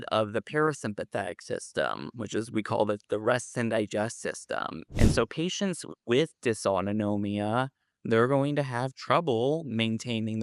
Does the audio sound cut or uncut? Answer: cut